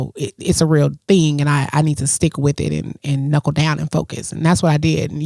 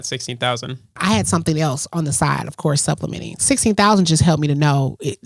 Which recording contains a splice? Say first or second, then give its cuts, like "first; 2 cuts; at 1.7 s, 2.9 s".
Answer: second; 2 cuts; at 0.9 s, 3.3 s